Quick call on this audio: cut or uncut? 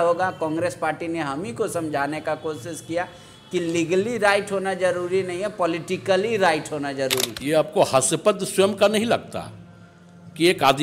cut